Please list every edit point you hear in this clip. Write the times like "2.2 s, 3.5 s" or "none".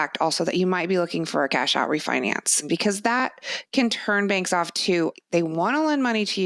2.7 s, 5.1 s